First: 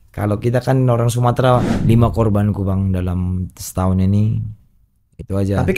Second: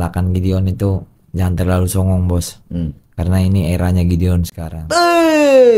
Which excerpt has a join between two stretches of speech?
first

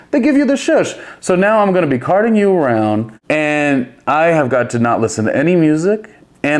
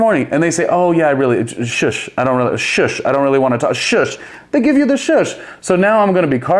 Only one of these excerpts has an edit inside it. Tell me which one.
first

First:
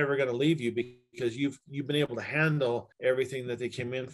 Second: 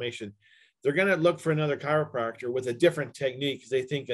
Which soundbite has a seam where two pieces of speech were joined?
first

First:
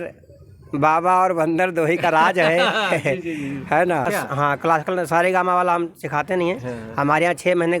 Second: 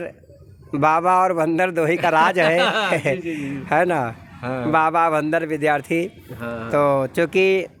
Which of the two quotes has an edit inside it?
first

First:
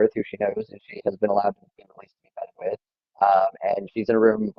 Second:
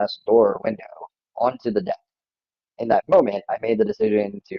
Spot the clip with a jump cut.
second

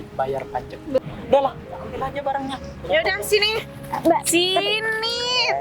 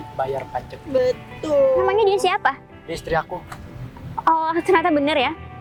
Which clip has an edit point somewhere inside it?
first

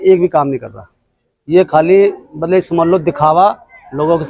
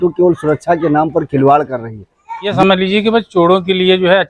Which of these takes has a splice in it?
second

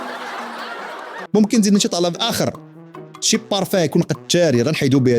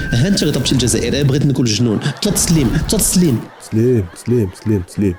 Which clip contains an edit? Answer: first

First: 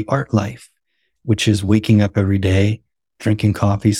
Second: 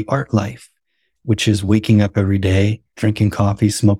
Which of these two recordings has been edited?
second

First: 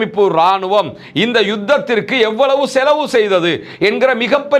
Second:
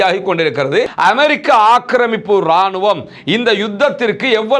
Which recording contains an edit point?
second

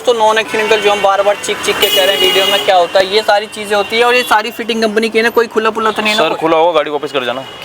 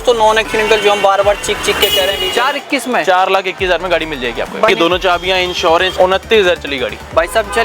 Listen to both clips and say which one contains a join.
second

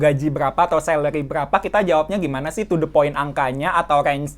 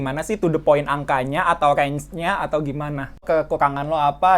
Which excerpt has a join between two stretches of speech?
second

